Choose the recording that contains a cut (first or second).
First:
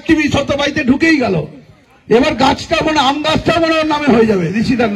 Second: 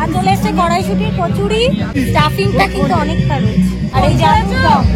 second